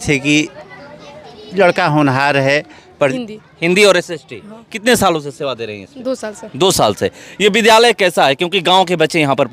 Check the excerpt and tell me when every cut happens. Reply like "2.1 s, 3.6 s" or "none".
3.1 s